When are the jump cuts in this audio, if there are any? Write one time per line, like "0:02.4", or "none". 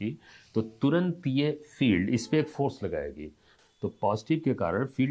0:03.5